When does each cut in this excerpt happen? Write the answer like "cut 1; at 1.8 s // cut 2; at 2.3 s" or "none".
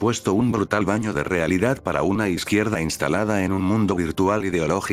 none

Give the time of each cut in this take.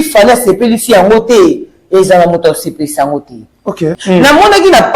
cut 1; at 4.0 s

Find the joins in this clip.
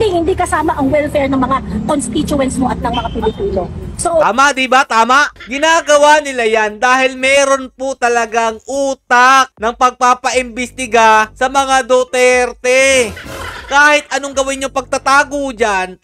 none

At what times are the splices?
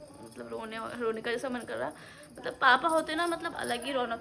none

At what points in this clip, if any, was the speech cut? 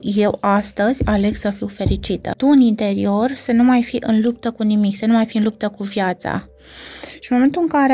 cut 1; at 2.3 s

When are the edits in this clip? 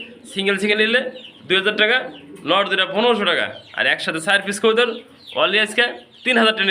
none

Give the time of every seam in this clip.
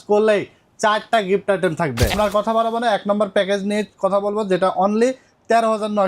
cut 1; at 2.1 s

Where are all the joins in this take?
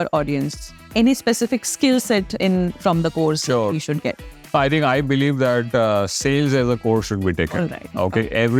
none

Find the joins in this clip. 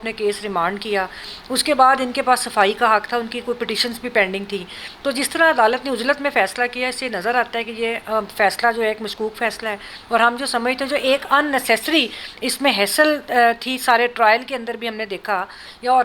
none

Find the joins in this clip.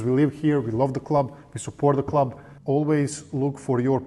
cut 1; at 2.5 s

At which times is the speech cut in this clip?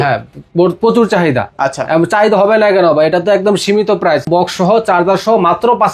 cut 1; at 4.3 s

